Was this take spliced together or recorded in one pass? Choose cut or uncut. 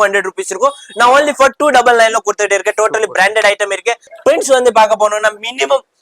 cut